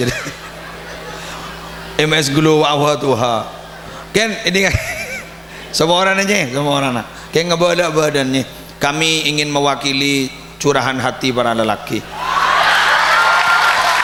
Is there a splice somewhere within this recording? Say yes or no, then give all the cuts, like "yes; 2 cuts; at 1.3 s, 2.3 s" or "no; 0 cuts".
no; 0 cuts